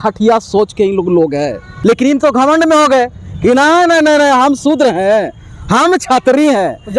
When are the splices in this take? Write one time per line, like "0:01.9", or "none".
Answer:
0:01.7